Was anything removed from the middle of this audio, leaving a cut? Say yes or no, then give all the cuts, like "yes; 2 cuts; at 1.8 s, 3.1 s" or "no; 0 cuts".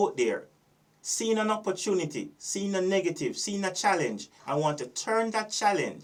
no; 0 cuts